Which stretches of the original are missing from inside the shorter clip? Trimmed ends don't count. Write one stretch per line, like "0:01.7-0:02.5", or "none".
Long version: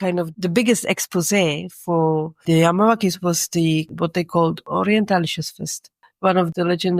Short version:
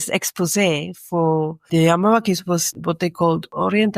0:03.5-0:03.9

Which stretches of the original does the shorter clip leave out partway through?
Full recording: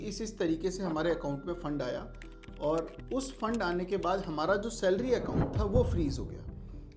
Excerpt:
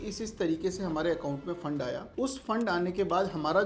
0:02.1-0:03.0

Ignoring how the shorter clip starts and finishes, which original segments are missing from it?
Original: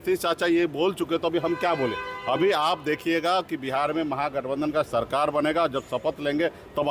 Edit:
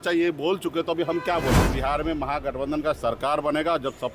0:02.0-0:03.6

